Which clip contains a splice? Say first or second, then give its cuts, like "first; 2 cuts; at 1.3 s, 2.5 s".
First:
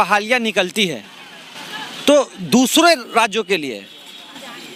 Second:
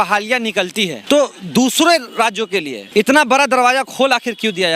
second; 2 cuts; at 1.0 s, 2.8 s